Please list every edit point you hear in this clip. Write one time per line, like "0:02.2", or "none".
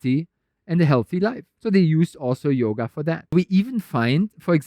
0:01.5
0:03.3